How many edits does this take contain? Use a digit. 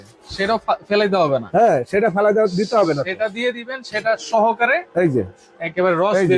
0